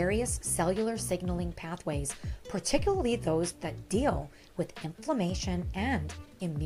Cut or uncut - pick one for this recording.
uncut